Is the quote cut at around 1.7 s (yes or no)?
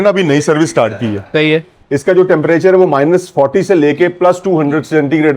yes